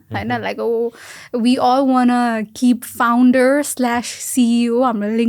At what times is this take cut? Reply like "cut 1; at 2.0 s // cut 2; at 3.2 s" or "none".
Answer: none